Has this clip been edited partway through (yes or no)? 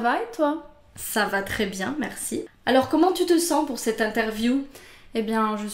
yes